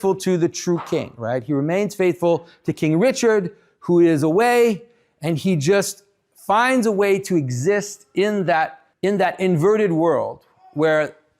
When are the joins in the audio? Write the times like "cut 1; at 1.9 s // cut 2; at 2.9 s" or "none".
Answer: cut 1; at 8.8 s